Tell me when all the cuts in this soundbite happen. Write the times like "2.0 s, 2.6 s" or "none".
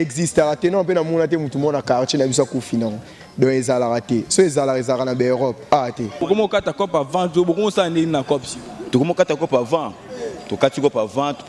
6.2 s